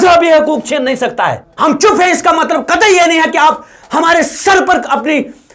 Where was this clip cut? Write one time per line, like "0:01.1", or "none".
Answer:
0:01.0